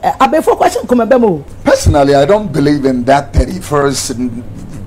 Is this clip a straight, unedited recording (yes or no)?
no